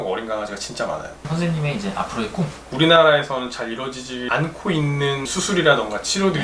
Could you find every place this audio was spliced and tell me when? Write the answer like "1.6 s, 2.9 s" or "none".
1.3 s, 2.7 s